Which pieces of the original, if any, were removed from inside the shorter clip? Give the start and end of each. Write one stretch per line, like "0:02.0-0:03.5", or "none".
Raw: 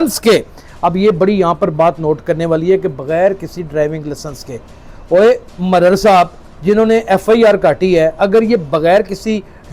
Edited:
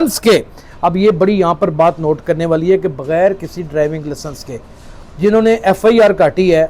0:05.0-0:06.4